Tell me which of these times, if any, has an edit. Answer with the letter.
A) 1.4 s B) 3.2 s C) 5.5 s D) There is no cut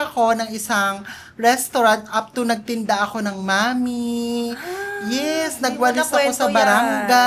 D